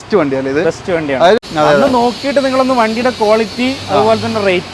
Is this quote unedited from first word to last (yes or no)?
no